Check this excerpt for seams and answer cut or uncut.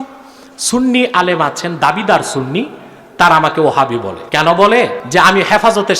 cut